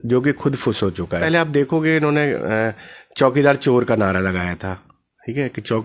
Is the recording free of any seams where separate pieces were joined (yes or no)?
no